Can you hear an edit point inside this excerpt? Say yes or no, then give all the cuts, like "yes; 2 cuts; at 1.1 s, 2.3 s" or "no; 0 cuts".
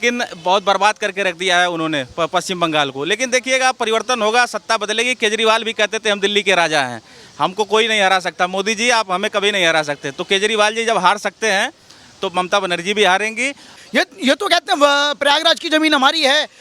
yes; 1 cut; at 13.8 s